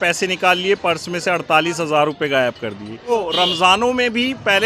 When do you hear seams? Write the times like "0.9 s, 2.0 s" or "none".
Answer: 2.9 s